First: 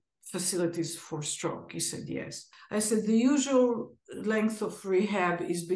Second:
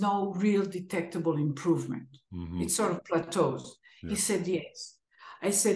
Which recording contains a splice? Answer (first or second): first